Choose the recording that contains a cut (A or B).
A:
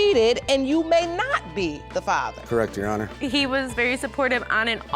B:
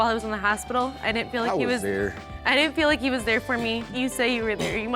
A